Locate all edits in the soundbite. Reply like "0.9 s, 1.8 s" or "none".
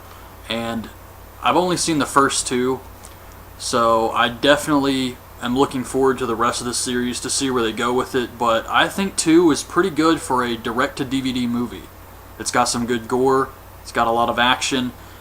10.2 s